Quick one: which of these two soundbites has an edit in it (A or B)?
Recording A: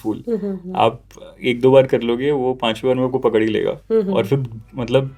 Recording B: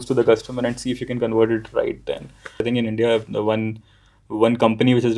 B